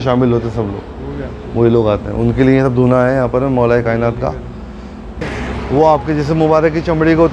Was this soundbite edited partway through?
yes; 1 cut; at 5.3 s

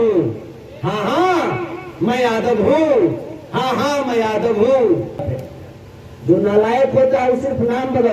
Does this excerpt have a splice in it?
yes; 1 cut; at 5.3 s

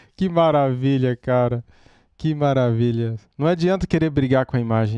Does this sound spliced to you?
no; 0 cuts

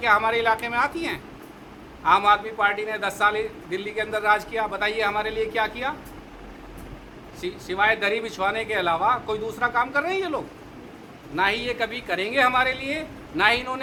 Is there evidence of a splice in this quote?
no; 0 cuts

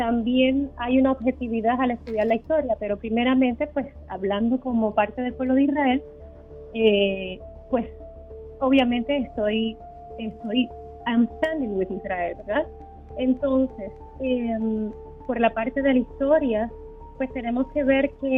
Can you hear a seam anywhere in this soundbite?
no; 0 cuts

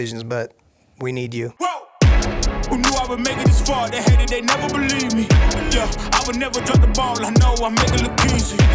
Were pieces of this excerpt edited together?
yes; 1 cut; at 1.5 s

